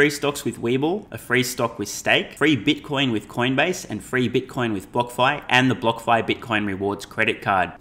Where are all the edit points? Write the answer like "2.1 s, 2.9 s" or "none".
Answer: 1.1 s, 2.3 s